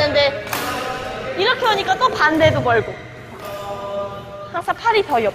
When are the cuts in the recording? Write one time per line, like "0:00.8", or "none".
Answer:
0:04.4